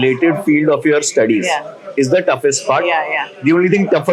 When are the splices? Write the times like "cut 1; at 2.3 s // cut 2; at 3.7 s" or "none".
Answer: none